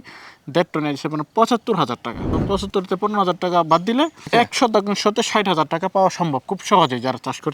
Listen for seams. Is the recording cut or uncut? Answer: cut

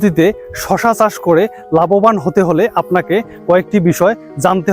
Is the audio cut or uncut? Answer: uncut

